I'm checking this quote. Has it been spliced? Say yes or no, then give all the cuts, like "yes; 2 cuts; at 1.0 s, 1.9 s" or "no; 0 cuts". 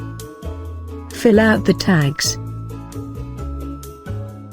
yes; 2 cuts; at 1.2 s, 2.2 s